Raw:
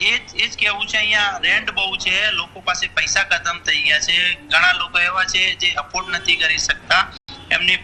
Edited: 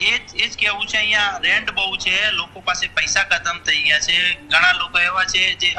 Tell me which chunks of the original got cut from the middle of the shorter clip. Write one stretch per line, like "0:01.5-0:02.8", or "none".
none